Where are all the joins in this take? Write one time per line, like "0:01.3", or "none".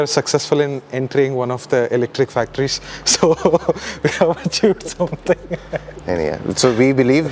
none